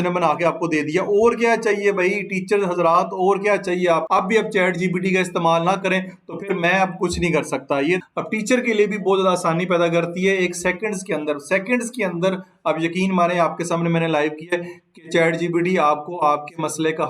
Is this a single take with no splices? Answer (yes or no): no